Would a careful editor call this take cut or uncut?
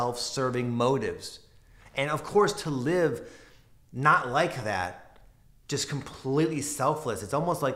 uncut